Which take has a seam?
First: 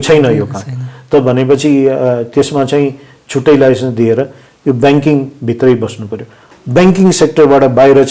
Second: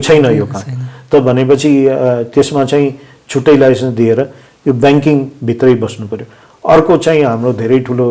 first; 1 cut; at 6.4 s

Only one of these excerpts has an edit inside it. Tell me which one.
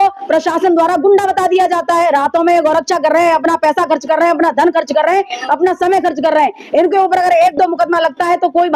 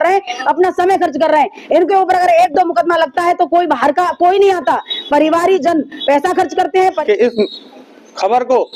second; 1 cut; at 7.0 s

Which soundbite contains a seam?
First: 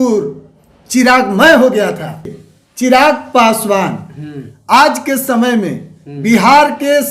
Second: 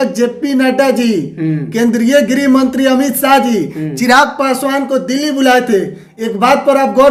first; 1 cut; at 2.3 s

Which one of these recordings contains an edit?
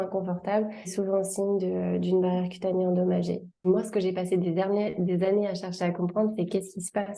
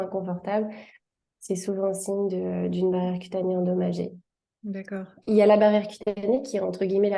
first; 2 cuts; at 0.9 s, 3.7 s

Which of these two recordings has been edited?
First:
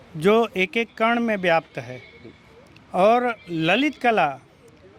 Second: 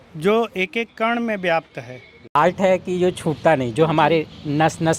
second; 1 cut; at 2.3 s

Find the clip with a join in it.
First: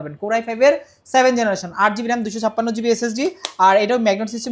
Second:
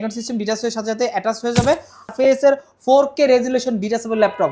second; 1 cut; at 2.1 s

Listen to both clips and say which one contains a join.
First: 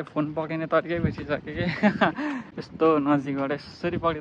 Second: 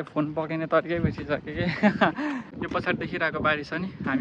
second; 1 cut; at 2.5 s

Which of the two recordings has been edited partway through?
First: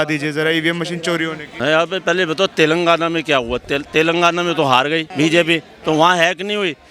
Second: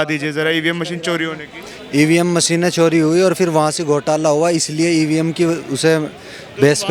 first; 2 cuts; at 1.4 s, 5.1 s

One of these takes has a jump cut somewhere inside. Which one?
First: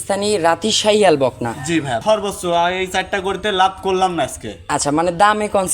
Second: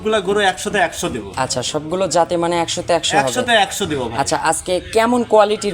first; 1 cut; at 2.0 s

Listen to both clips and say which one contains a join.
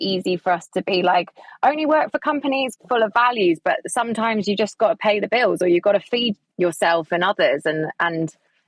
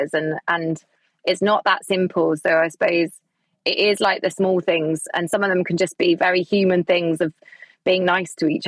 first; 2 cuts; at 2.7 s, 6.4 s

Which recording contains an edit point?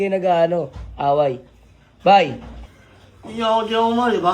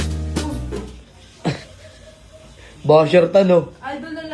first; 1 cut; at 2.7 s

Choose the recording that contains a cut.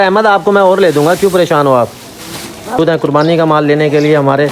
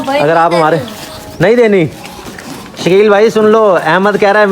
first; 1 cut; at 2.8 s

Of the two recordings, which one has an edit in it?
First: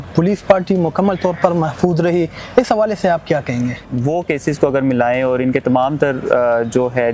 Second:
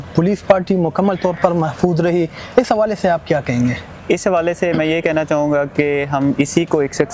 first; 1 cut; at 3.9 s

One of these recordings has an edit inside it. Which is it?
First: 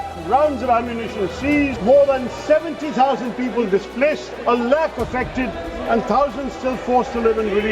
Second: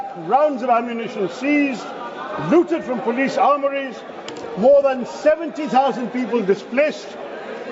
first; 2 cuts; at 1.8 s, 4.3 s

